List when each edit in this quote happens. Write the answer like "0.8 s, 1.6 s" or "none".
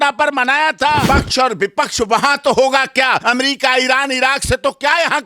1.0 s, 3.2 s